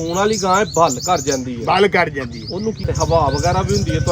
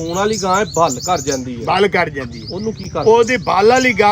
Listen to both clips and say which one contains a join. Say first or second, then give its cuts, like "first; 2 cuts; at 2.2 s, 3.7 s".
first; 1 cut; at 2.8 s